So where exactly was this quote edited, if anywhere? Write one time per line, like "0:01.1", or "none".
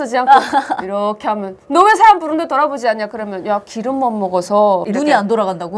0:04.9